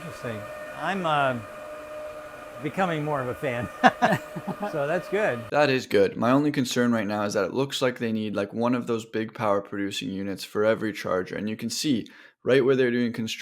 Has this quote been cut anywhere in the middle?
no; 0 cuts

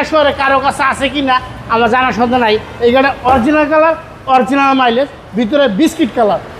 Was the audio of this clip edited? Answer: no; 0 cuts

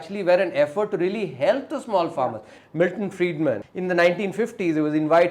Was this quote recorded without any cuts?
no; 2 cuts; at 2.6 s, 3.6 s

